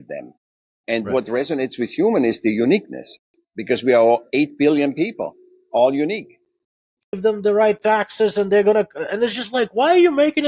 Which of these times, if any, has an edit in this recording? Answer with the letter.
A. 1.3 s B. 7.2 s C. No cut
B